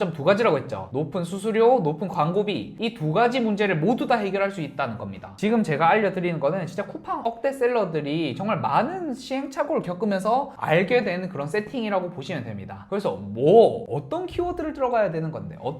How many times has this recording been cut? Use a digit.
3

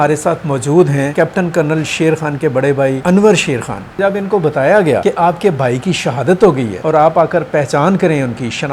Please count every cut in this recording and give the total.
5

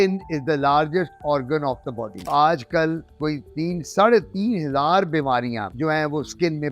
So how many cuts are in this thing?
1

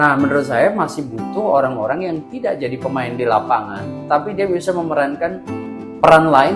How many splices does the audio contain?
0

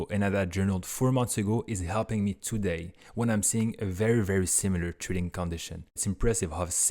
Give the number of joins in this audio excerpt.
1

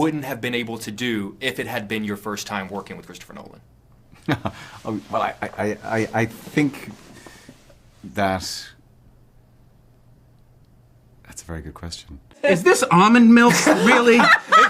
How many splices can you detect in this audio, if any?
1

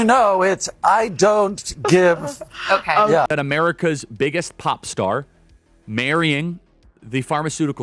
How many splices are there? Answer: 1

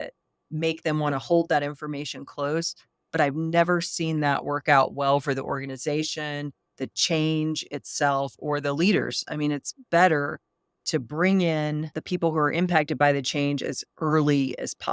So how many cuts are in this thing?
1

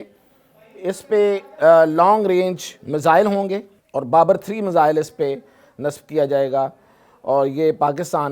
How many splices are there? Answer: 1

